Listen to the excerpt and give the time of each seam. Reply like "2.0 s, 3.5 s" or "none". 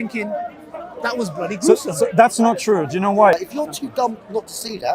3.3 s